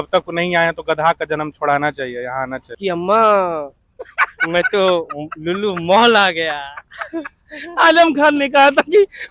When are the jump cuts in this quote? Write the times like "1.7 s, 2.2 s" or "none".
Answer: 2.7 s